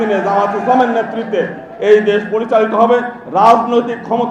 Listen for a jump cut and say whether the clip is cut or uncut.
uncut